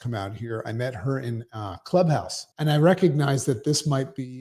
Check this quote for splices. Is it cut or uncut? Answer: cut